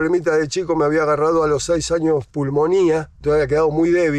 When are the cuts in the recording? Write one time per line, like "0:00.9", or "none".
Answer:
none